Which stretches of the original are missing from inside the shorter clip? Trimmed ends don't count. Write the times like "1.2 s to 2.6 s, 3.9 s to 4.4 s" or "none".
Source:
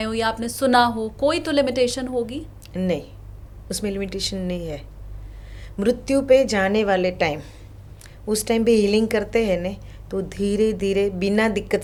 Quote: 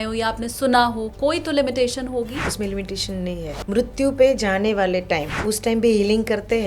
2.5 s to 3.7 s, 4.8 s to 5.7 s, 7.4 s to 8.2 s